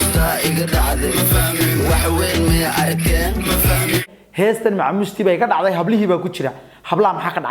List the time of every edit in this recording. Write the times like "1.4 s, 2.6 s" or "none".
4.2 s